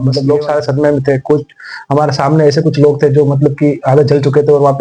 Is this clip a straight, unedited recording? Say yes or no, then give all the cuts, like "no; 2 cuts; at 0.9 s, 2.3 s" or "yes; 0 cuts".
yes; 0 cuts